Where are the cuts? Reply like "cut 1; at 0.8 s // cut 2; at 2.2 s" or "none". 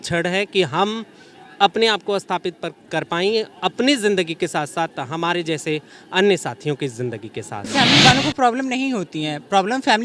cut 1; at 7.7 s